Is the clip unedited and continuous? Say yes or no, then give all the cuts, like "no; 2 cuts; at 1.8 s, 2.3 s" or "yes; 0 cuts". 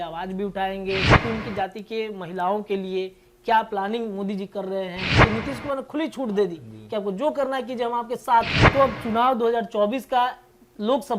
no; 3 cuts; at 1.1 s, 5.1 s, 8.6 s